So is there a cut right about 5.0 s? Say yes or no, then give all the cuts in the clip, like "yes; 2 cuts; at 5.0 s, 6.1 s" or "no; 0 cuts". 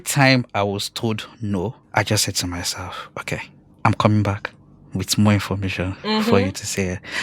no; 2 cuts; at 1.8 s, 3.6 s